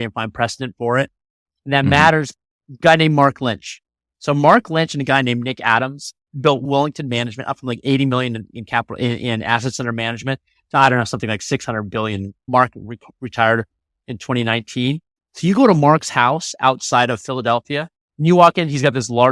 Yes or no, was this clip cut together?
yes